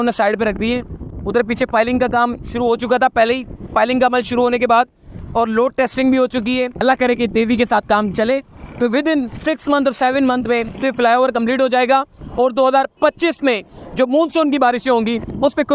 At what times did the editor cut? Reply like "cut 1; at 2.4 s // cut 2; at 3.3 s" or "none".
cut 1; at 5.1 s // cut 2; at 6.8 s // cut 3; at 10.7 s